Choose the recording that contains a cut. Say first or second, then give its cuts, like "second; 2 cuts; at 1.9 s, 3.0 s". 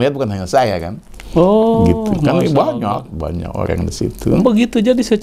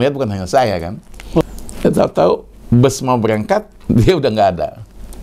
second; 1 cut; at 1.4 s